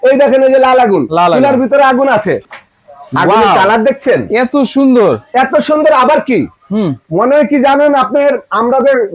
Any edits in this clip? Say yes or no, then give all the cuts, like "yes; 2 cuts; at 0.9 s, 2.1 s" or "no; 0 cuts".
yes; 1 cut; at 2.5 s